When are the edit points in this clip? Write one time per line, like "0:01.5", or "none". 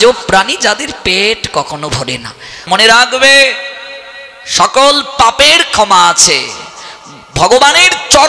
0:02.6